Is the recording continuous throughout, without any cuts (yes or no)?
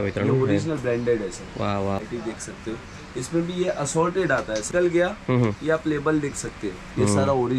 no